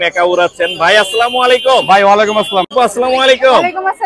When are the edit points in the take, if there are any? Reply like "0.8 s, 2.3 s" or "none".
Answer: 2.7 s